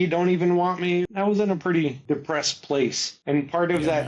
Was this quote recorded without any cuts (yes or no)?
no